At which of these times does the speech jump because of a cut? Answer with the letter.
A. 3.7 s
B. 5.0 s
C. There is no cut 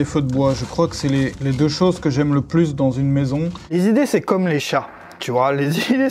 A